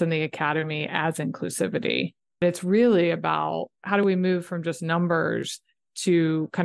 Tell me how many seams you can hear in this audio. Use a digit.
2